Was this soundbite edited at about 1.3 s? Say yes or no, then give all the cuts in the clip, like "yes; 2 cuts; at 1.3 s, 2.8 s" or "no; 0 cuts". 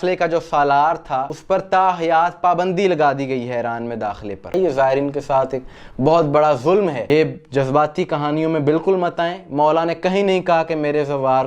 yes; 3 cuts; at 1.3 s, 4.5 s, 7.0 s